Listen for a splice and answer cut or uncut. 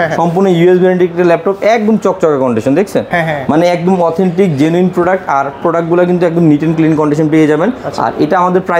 uncut